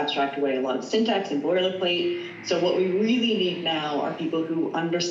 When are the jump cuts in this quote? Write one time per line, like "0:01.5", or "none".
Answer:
none